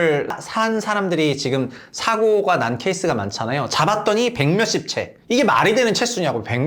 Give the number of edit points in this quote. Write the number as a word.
zero